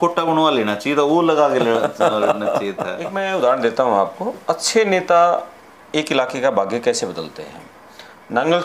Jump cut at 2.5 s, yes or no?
yes